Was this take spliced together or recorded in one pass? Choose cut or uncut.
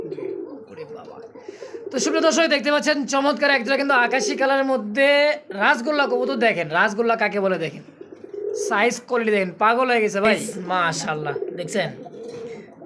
cut